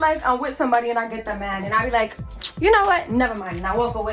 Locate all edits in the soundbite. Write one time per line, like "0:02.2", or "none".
none